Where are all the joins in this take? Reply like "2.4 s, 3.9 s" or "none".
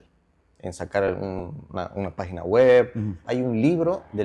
3.2 s